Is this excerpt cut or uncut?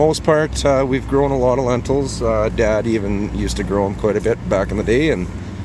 uncut